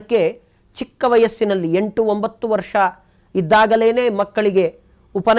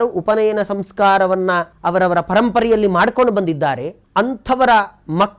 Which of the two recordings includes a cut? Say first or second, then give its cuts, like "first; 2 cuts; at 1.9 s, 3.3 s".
second; 2 cuts; at 1.7 s, 3.9 s